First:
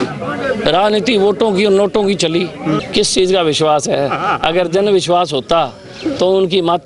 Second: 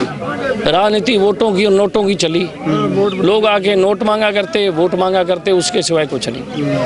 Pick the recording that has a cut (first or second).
first